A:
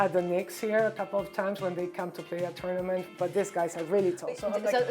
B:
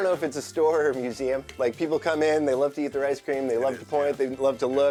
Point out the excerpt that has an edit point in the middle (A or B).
A